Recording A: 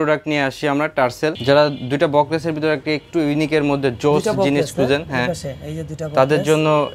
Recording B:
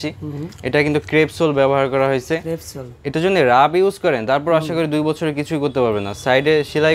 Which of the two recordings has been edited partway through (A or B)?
A